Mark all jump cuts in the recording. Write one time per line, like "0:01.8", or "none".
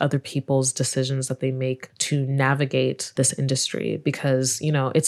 0:01.9
0:03.1